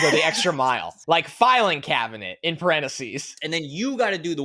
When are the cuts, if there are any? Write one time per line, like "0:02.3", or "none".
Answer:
0:00.9
0:03.5